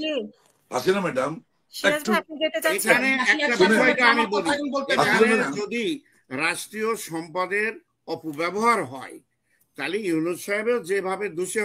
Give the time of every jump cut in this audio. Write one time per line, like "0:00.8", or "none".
none